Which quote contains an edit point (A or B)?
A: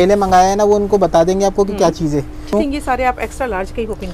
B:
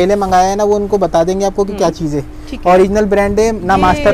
A